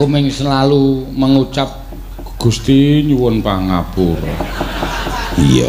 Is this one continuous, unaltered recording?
yes; 0 cuts

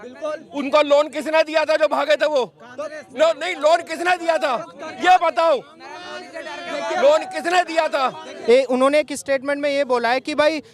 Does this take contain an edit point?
yes; 1 cut; at 8.3 s

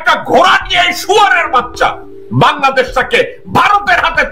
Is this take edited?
no; 0 cuts

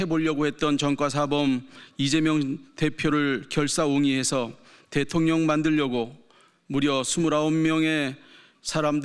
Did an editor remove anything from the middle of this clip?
no; 0 cuts

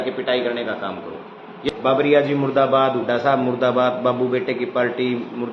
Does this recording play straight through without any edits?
no; 1 cut; at 1.7 s

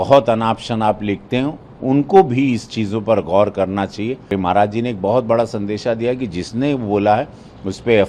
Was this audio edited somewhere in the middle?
yes; 1 cut; at 4.3 s

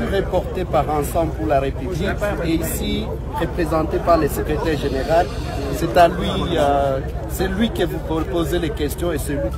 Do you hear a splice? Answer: no; 0 cuts

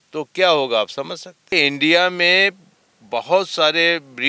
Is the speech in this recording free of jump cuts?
no; 1 cut; at 1.5 s

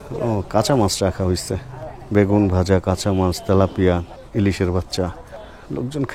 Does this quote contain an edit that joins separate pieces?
no; 0 cuts

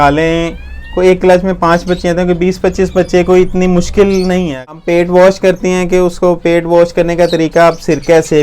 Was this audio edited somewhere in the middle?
yes; 1 cut; at 4.5 s

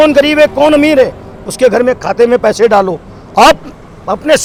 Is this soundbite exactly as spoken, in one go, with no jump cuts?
yes; 0 cuts

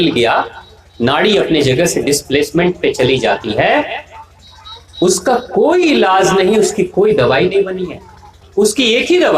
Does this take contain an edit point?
yes; 1 cut; at 8.3 s

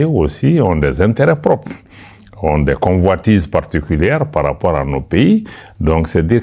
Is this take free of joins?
yes; 0 cuts

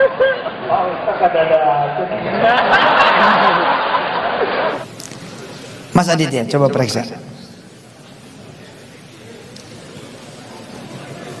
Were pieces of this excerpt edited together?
yes; 1 cut; at 4.8 s

